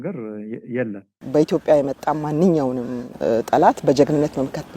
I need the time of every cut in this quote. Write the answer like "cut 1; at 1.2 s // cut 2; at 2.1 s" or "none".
cut 1; at 1.2 s